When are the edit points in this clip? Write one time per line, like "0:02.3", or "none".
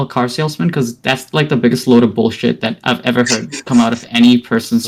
none